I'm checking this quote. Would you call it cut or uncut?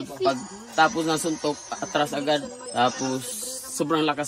cut